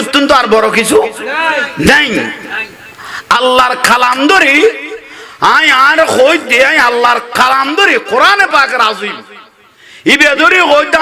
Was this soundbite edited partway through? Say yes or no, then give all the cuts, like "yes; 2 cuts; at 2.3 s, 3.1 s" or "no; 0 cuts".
no; 0 cuts